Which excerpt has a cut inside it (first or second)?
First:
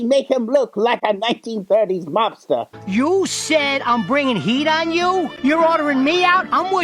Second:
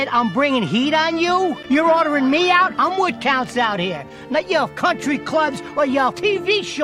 first